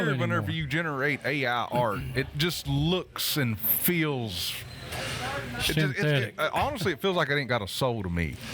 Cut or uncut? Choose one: uncut